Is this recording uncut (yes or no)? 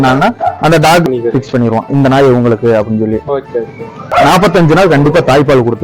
no